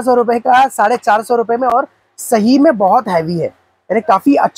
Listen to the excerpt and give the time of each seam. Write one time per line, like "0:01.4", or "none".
none

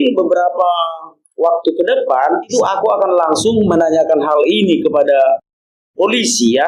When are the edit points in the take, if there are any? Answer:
0:02.5

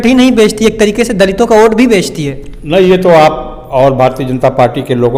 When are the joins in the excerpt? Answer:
none

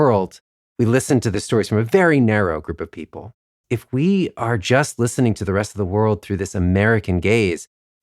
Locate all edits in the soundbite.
0:01.3
0:03.6

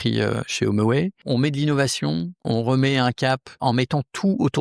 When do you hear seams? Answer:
0:01.2
0:02.4
0:03.6

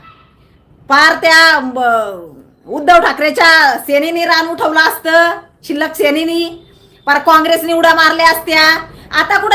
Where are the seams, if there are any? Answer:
none

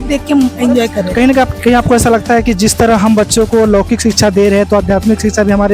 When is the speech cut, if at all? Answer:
none

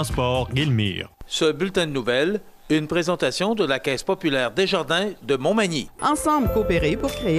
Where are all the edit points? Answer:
0:01.1

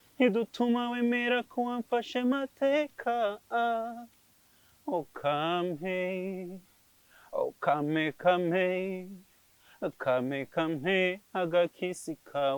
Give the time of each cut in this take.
none

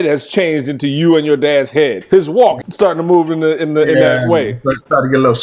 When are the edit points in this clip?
0:02.0
0:02.7

